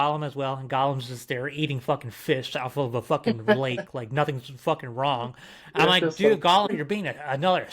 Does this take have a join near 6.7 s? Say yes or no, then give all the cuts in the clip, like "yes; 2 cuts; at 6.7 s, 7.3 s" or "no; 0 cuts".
yes; 1 cut; at 6.7 s